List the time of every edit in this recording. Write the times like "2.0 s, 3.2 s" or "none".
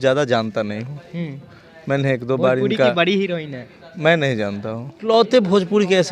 5.0 s